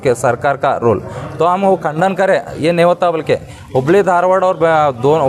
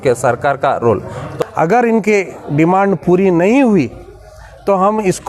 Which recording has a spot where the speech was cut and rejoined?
second; 1 cut; at 1.3 s

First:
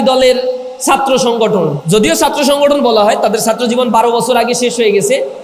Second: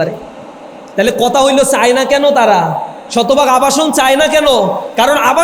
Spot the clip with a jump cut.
first; 1 cut; at 1.8 s

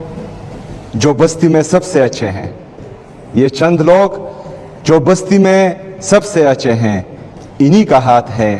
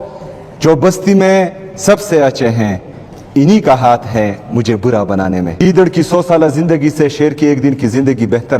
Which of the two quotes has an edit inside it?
second; 1 cut; at 5.5 s

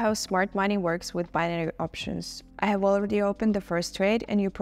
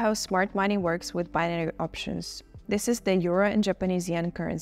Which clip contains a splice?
first; 1 cut; at 2.4 s

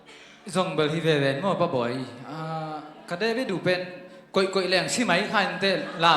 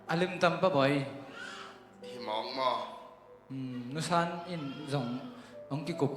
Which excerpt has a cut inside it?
first; 1 cut; at 1.5 s

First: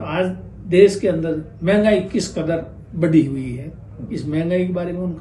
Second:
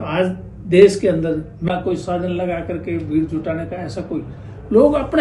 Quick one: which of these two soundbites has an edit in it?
second; 1 cut; at 1.7 s

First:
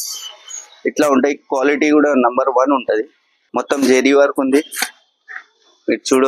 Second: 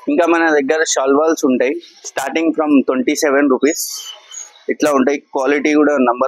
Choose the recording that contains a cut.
first; 1 cut; at 3.4 s

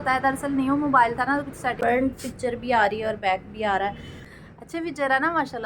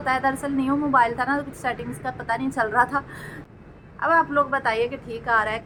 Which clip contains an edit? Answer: first; 2 cuts; at 1.8 s, 4.3 s

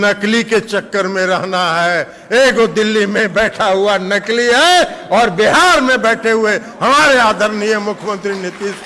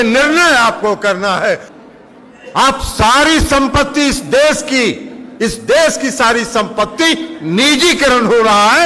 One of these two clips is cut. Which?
second; 1 cut; at 1.7 s

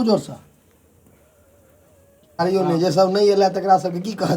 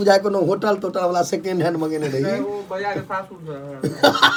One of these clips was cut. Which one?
first; 1 cut; at 2.4 s

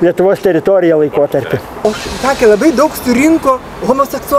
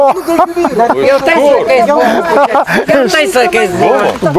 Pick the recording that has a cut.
first; 1 cut; at 1.6 s

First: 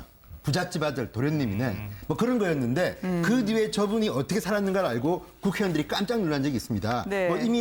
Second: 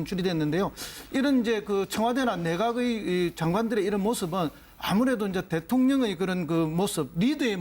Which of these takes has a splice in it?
second; 1 cut; at 1.6 s

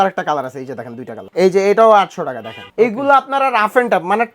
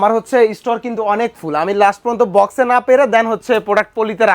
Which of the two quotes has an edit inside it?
first; 2 cuts; at 1.1 s, 2.5 s

